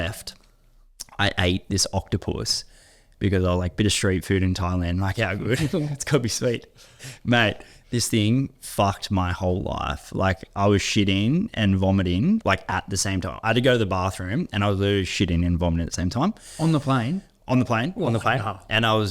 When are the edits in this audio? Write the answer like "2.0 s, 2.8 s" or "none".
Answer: none